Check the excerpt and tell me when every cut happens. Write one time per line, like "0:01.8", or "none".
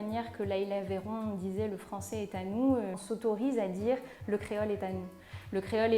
0:03.0